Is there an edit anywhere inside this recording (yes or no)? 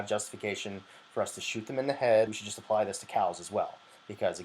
yes